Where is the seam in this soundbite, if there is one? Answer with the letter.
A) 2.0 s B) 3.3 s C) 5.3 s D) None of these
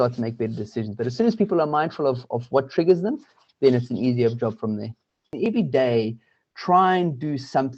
C